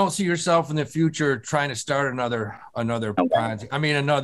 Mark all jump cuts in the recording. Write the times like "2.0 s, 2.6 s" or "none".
none